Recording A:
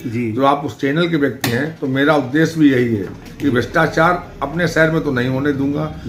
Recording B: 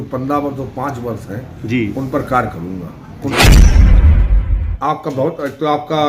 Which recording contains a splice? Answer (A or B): B